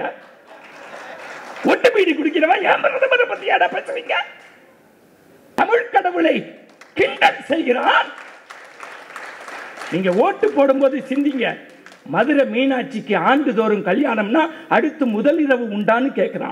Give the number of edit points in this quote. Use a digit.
1